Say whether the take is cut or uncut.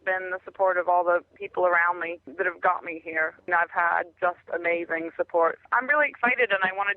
cut